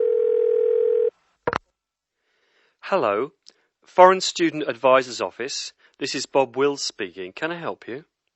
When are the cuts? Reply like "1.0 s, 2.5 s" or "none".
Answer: 0.9 s